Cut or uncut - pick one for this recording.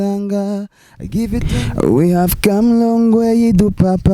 cut